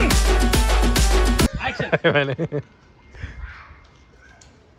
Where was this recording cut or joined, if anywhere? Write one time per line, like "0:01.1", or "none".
none